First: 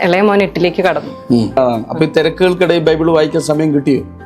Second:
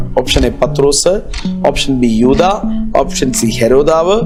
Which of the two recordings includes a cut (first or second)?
first